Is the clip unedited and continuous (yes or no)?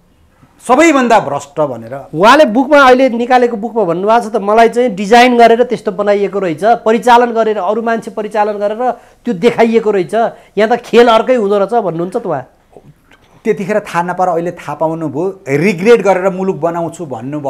yes